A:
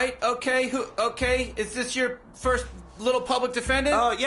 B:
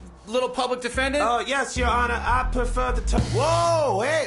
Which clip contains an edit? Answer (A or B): B